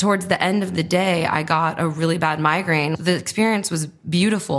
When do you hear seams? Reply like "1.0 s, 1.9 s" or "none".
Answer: 2.9 s